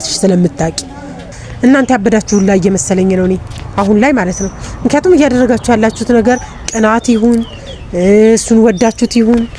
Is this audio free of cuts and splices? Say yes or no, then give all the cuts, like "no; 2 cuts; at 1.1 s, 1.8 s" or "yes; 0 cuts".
no; 1 cut; at 1.3 s